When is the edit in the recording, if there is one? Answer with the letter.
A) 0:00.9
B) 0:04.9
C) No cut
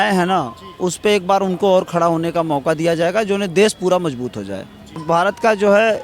B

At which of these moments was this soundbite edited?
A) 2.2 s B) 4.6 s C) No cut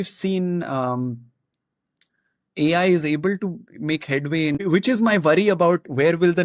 B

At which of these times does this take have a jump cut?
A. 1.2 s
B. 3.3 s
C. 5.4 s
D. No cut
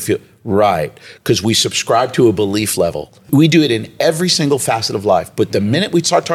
B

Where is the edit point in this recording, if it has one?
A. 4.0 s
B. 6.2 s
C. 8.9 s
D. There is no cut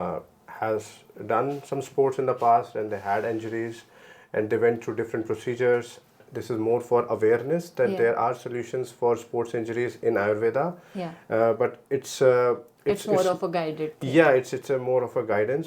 B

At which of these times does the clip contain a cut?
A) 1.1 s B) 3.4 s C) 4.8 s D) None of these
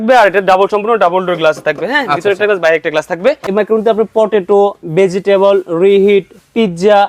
B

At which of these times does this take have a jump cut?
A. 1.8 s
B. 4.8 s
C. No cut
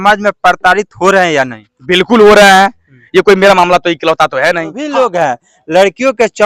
B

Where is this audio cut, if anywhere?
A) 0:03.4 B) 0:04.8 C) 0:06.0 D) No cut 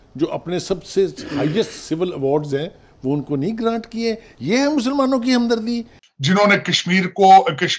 C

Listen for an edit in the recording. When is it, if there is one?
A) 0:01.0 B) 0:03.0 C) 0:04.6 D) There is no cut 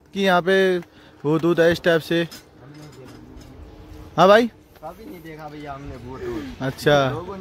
D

